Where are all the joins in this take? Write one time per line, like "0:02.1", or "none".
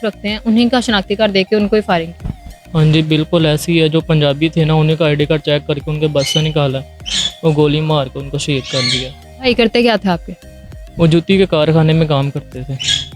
none